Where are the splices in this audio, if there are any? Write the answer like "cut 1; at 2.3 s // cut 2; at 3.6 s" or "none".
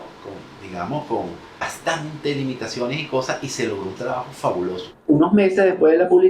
cut 1; at 1.7 s // cut 2; at 4.9 s

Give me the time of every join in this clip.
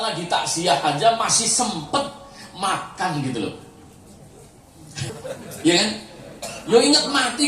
cut 1; at 5.1 s

